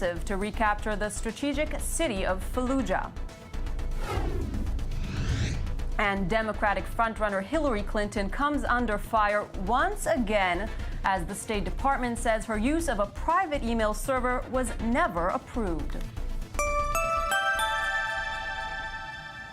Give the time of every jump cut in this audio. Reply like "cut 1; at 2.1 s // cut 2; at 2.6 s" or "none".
cut 1; at 5.8 s